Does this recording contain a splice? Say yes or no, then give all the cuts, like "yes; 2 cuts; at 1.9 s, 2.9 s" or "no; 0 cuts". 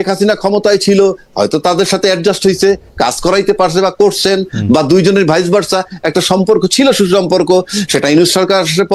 no; 0 cuts